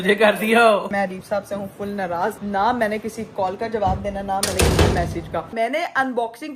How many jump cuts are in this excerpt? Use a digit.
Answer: 3